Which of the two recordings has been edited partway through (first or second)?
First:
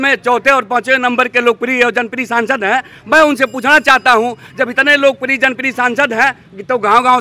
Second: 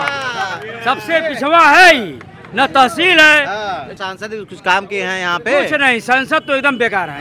second